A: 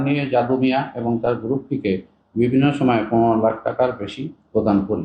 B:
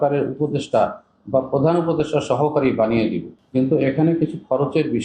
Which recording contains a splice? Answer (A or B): B